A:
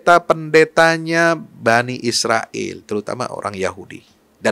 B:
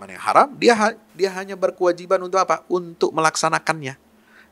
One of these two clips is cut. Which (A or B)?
B